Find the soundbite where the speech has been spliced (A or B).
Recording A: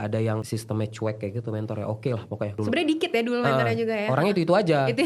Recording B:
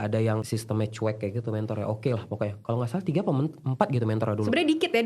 A